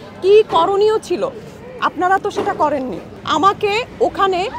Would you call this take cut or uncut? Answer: cut